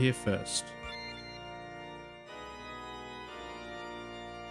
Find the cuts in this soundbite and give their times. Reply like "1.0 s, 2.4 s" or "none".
none